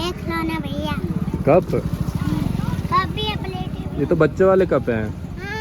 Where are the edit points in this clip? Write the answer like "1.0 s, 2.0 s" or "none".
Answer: none